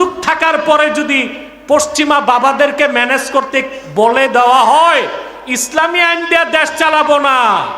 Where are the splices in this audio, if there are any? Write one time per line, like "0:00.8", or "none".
none